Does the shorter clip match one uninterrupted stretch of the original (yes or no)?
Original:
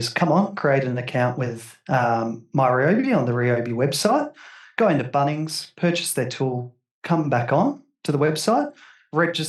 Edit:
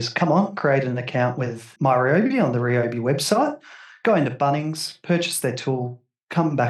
no